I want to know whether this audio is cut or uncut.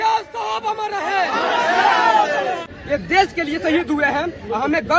cut